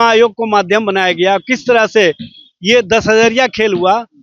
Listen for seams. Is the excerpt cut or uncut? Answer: uncut